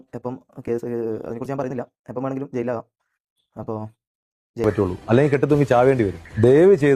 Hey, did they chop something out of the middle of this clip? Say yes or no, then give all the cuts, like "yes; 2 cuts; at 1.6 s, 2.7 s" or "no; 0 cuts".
yes; 1 cut; at 4.6 s